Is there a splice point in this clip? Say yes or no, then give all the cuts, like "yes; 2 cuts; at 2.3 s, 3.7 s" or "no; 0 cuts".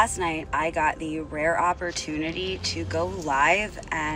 no; 0 cuts